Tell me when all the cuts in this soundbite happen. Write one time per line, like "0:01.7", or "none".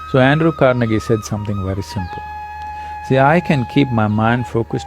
none